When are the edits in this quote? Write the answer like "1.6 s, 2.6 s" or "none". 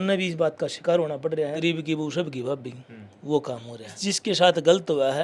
1.6 s, 4.0 s